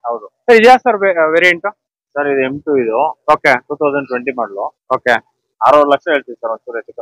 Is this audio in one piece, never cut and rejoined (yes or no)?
yes